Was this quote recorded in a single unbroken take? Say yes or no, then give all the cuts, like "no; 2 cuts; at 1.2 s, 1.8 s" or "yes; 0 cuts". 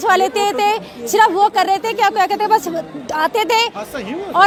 yes; 0 cuts